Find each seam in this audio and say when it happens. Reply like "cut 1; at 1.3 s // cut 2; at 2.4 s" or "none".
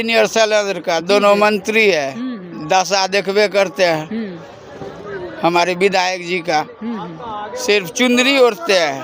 none